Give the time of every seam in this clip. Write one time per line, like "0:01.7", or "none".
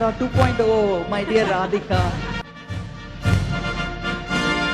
0:02.3